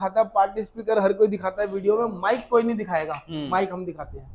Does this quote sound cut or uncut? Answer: uncut